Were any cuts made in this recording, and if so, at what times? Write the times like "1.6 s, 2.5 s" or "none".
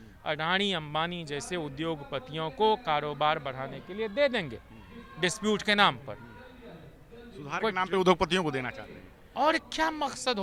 none